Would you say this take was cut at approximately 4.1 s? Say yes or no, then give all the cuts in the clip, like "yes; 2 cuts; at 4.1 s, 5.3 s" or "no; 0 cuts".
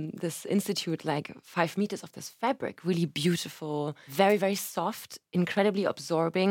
yes; 1 cut; at 4.1 s